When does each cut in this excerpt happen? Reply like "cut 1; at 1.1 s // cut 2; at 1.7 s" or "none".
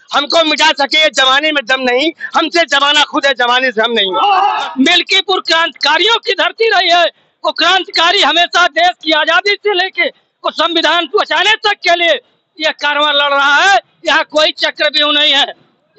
cut 1; at 4.6 s // cut 2; at 13.9 s